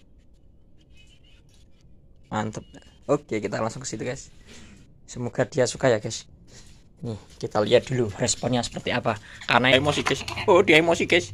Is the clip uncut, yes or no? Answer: no